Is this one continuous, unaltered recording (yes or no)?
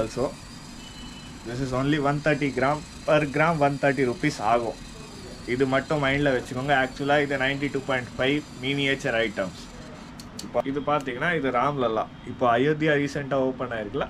no